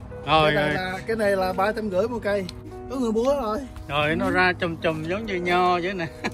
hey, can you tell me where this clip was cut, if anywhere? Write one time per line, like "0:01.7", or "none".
0:02.7

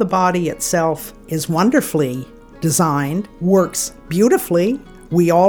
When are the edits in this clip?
0:01.1
0:03.3

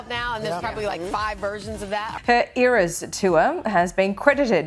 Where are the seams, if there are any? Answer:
0:02.1

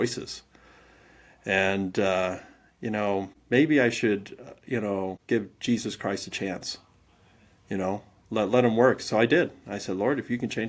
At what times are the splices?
0:03.4
0:05.2

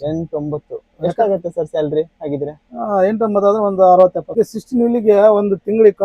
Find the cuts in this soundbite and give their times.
0:04.3

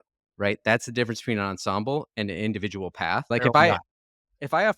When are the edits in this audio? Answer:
0:03.3

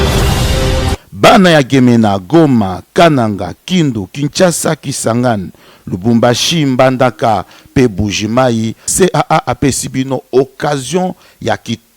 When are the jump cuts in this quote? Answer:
0:01.2

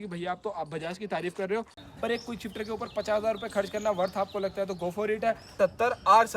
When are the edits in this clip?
0:01.9
0:05.5

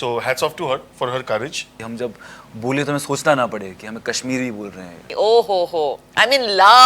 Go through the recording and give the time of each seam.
0:01.8
0:05.0

